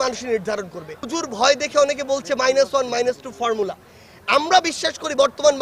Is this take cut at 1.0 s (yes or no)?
yes